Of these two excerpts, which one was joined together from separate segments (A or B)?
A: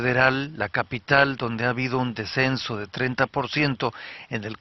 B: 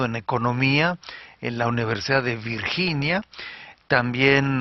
B